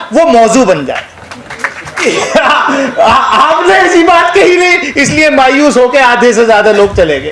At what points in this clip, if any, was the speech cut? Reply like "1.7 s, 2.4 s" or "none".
2.0 s